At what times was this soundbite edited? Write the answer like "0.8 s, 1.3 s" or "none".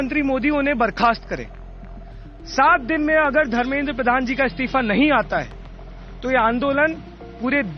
none